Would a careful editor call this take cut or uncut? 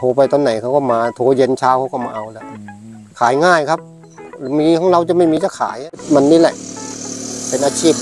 cut